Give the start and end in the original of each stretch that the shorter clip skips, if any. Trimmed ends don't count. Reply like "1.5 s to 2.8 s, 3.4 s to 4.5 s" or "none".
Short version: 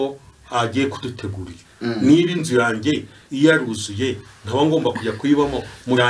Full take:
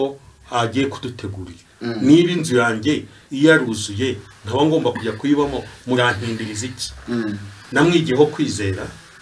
none